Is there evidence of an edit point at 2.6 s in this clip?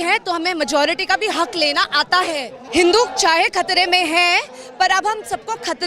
yes; 1 cut; at 2.6 s

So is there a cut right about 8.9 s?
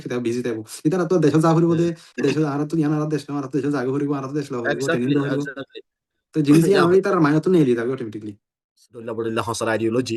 yes; 1 cut; at 8.9 s

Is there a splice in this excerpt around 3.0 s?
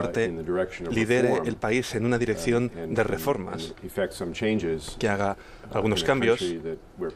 no; 0 cuts

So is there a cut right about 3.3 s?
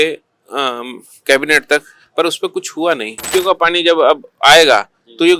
yes; 1 cut; at 3.3 s

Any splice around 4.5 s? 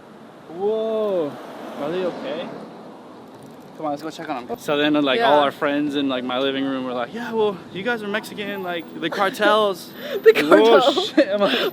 yes; 1 cut; at 4.5 s

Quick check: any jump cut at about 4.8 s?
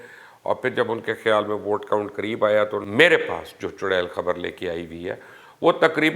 no; 1 cut; at 2.9 s

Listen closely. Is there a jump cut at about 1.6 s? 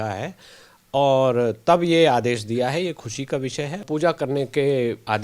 no; 1 cut; at 3.8 s

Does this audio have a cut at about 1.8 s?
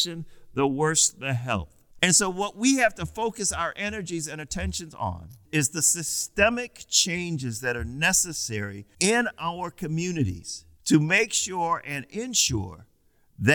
yes; 1 cut; at 1.8 s

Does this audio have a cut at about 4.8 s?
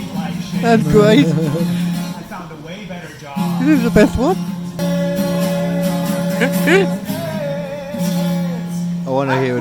yes; 1 cut; at 4.8 s

